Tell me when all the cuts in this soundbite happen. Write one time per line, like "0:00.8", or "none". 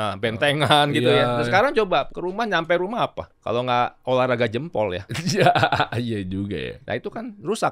0:02.1
0:03.3
0:06.8

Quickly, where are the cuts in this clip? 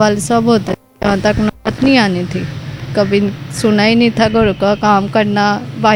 none

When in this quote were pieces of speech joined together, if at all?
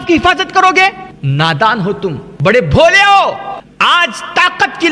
0:01.1
0:02.3
0:03.6

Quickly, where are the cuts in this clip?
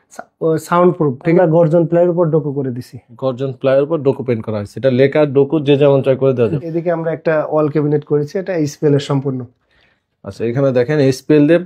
0:01.4
0:06.6

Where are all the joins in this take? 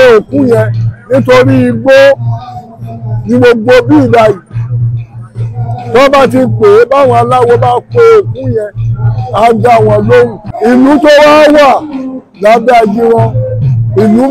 0:10.4

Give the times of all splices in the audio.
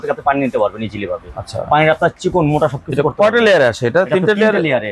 none

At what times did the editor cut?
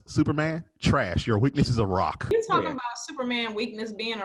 0:02.2

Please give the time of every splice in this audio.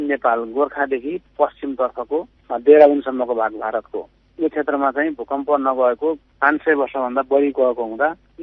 none

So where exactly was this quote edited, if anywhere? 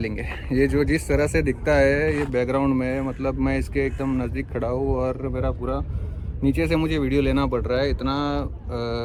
none

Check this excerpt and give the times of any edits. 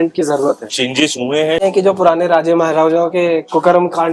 0:01.6

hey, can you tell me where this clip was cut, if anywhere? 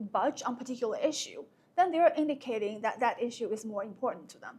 none

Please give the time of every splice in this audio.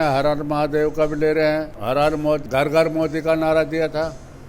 0:02.0

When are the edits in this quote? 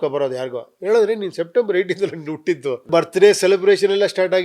0:02.9

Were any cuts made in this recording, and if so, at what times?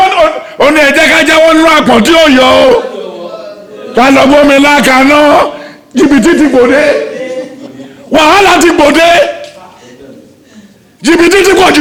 none

